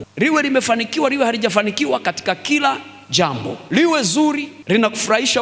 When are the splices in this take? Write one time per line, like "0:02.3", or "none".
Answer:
0:03.6
0:04.5